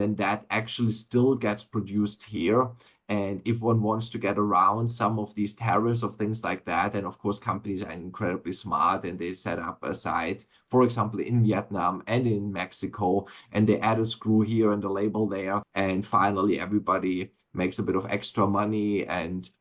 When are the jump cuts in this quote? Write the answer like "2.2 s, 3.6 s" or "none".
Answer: 15.7 s